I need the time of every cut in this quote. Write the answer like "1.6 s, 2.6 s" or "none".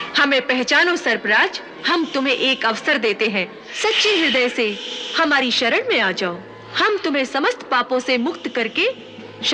1.8 s, 3.6 s